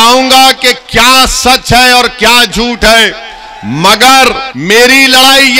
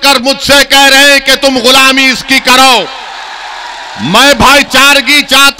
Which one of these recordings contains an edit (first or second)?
first